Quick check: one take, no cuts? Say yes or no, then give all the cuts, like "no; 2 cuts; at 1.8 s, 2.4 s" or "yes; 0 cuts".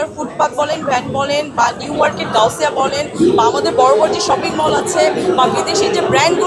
yes; 0 cuts